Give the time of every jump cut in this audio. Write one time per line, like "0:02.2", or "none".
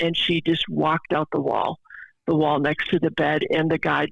none